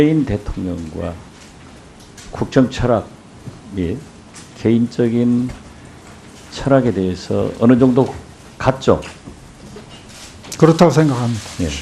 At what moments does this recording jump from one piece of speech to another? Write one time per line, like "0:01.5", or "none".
0:08.4